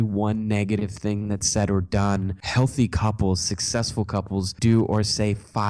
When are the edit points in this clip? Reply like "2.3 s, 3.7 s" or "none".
2.4 s, 4.5 s